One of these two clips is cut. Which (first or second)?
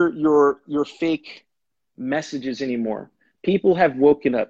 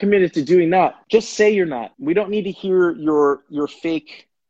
second